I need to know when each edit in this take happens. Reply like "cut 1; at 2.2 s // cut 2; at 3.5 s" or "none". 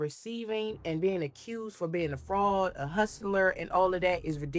none